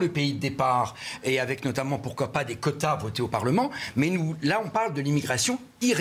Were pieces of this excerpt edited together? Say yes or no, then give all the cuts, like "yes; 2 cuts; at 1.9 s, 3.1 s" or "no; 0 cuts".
no; 0 cuts